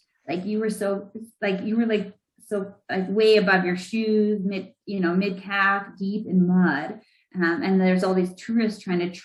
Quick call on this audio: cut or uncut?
uncut